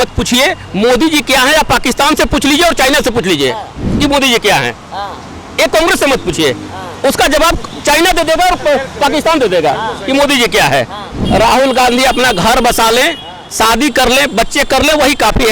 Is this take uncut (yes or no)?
no